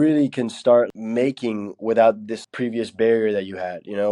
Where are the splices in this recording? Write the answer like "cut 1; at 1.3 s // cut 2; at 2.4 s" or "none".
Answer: cut 1; at 0.9 s // cut 2; at 2.3 s